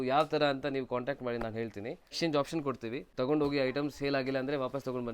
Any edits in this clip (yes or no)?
yes